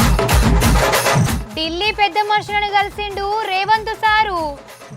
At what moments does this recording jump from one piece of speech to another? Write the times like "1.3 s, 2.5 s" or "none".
1.2 s